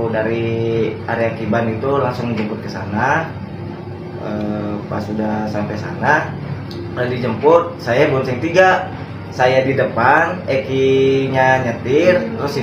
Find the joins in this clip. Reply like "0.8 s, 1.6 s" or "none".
none